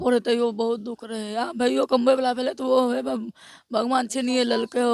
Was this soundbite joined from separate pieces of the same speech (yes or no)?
no